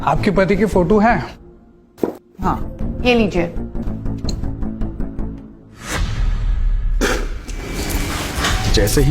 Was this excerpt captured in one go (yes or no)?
no